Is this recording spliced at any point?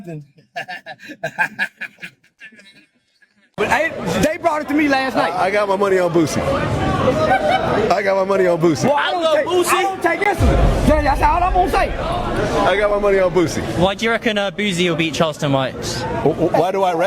yes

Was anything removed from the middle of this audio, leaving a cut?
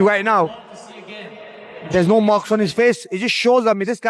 no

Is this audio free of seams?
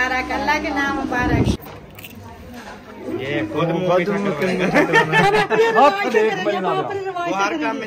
no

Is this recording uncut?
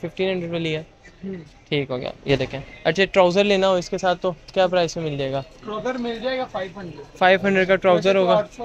yes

